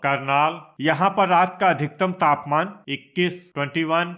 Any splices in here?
no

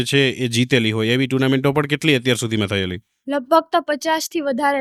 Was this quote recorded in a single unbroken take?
yes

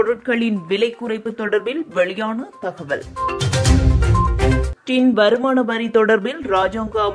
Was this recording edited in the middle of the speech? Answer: no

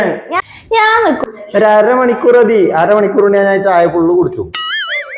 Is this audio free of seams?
no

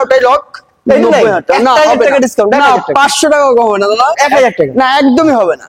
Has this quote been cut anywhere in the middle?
no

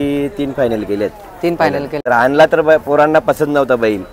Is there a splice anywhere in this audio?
yes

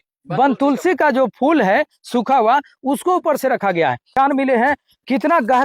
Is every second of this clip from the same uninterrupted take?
no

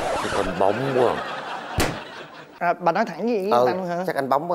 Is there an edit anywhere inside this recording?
no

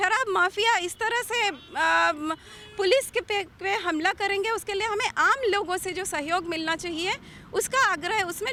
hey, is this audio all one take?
yes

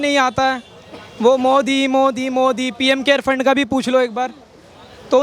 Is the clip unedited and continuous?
yes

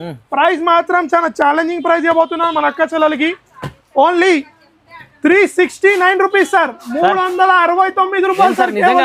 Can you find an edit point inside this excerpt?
no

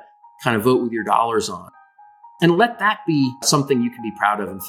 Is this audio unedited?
no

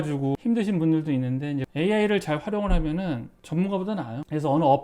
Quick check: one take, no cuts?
no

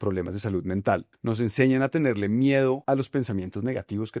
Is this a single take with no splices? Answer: no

